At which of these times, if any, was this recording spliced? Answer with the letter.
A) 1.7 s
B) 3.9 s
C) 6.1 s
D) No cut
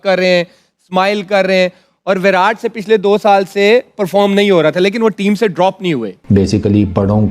C